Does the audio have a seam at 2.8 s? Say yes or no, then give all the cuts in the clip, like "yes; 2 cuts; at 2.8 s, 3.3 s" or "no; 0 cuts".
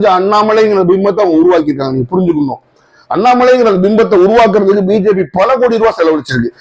no; 0 cuts